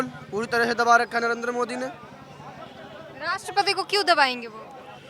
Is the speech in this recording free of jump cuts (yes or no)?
yes